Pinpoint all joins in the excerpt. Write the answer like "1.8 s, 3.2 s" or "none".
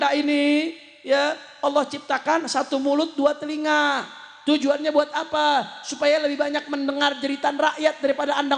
none